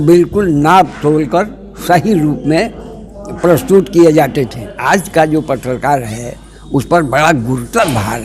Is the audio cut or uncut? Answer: cut